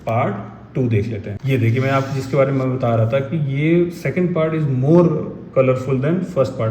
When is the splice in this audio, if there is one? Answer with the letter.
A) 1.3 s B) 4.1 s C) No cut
A